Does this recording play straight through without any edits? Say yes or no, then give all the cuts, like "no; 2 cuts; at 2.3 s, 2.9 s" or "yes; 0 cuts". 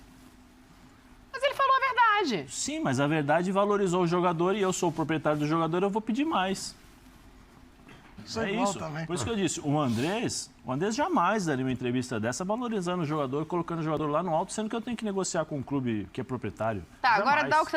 no; 1 cut; at 8.2 s